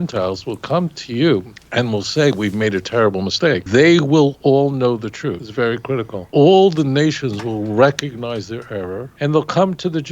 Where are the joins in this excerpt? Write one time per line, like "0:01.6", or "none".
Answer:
0:01.6
0:03.6
0:05.4
0:06.2
0:09.0